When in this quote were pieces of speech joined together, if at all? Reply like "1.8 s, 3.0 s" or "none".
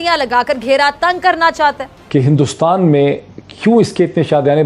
1.9 s